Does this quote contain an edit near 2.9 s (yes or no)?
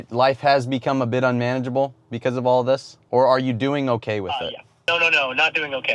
yes